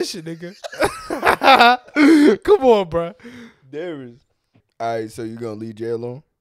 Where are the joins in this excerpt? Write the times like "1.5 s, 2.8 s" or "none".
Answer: 4.6 s